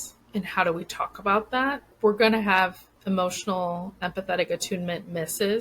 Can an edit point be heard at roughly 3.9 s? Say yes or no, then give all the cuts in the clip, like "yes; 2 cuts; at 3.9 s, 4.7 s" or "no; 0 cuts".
no; 1 cut; at 1.9 s